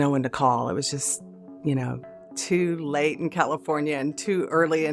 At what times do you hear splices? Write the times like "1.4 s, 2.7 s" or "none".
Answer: 2.1 s